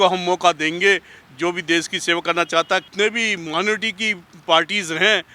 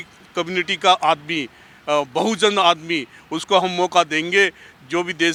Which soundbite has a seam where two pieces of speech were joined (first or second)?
first